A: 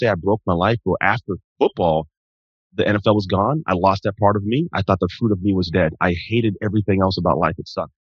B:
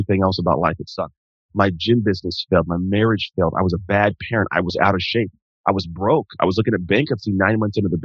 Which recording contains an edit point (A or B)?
A